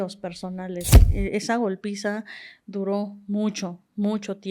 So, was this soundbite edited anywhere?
yes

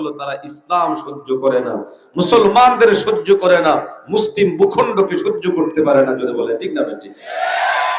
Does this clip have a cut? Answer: no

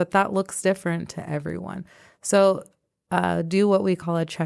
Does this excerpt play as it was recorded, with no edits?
yes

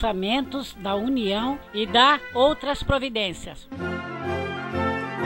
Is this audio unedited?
yes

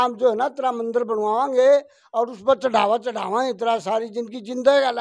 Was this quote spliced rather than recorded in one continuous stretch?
no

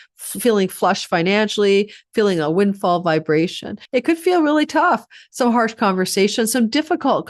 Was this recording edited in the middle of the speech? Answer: yes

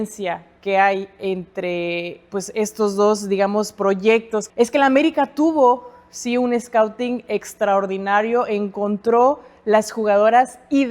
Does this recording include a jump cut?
yes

